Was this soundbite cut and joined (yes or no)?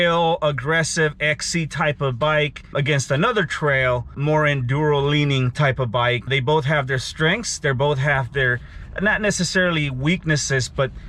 yes